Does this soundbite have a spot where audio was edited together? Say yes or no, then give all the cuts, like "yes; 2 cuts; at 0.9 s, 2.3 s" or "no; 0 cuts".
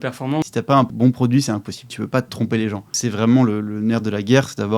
yes; 3 cuts; at 0.9 s, 1.9 s, 2.9 s